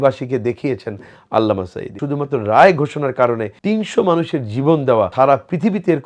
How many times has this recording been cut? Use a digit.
3